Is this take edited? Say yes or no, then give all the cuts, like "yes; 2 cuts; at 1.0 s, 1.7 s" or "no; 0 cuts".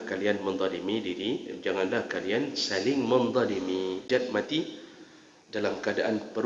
yes; 1 cut; at 4.0 s